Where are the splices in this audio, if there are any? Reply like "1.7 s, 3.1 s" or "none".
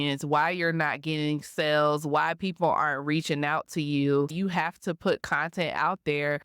4.3 s